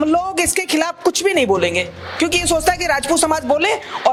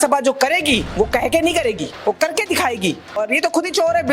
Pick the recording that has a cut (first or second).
second